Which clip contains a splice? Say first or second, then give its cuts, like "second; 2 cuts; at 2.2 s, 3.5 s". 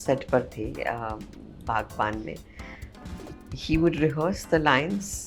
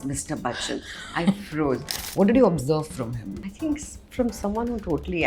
second; 2 cuts; at 1.9 s, 3.4 s